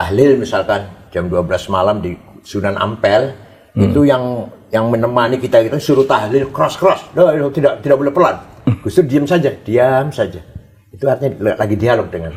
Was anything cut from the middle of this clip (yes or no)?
no